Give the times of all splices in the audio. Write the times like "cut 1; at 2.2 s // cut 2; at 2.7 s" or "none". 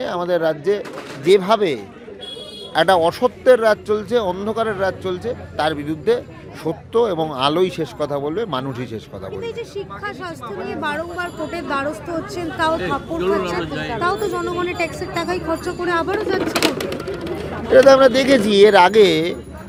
none

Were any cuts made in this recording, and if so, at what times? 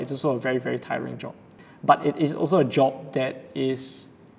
cut 1; at 1.7 s

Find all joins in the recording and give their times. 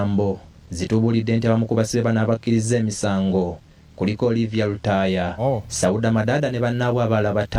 none

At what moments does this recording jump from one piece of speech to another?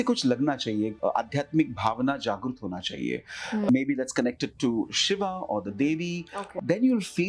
cut 1; at 1.0 s // cut 2; at 3.7 s // cut 3; at 6.4 s

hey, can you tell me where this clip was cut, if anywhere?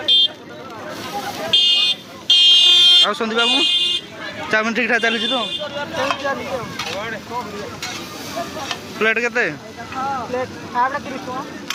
none

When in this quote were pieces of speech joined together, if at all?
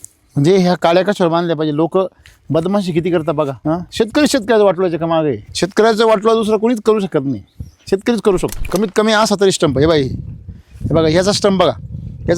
cut 1; at 3.6 s // cut 2; at 5.5 s // cut 3; at 8.6 s

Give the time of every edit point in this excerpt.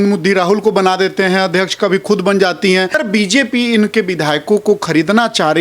cut 1; at 3.0 s

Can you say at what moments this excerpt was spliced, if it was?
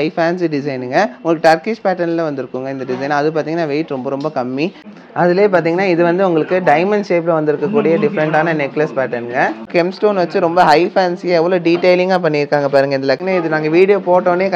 cut 1; at 4.9 s // cut 2; at 9.7 s // cut 3; at 13.2 s

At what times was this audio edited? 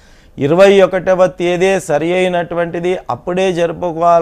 cut 1; at 2.1 s

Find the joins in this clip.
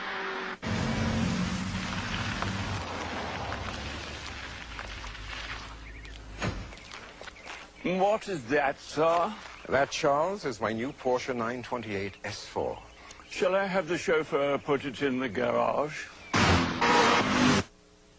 cut 1; at 12.8 s

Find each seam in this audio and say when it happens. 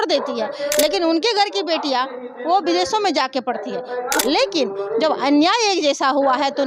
cut 1; at 4.2 s

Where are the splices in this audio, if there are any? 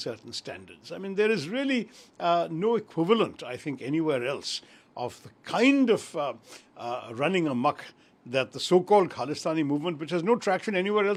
none

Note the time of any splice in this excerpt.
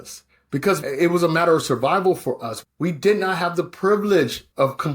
cut 1; at 0.8 s // cut 2; at 2.5 s

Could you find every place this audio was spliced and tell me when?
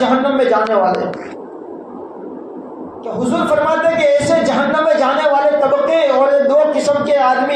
cut 1; at 3.1 s

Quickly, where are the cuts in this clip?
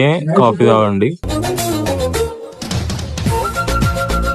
cut 1; at 1.3 s

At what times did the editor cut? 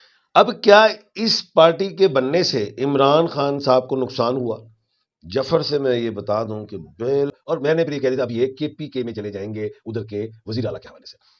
cut 1; at 7.4 s

